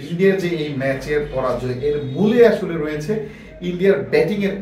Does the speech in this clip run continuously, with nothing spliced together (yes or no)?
yes